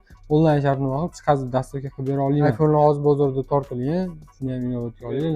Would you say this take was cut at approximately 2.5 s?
yes; 1 cut; at 2.5 s

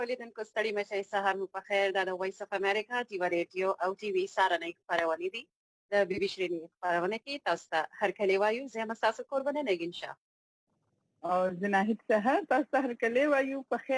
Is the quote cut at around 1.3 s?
yes; 1 cut; at 1.3 s

